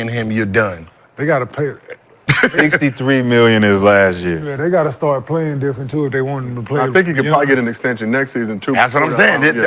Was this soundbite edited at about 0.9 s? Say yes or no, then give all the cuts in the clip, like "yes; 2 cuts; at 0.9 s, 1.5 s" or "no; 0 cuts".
no; 0 cuts